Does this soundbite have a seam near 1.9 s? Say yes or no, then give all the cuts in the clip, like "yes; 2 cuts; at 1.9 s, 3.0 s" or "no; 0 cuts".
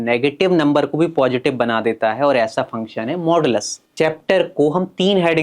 no; 1 cut; at 3.8 s